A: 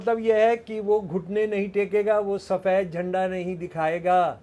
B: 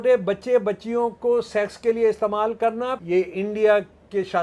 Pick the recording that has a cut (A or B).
B